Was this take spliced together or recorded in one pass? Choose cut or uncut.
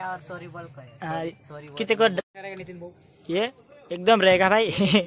cut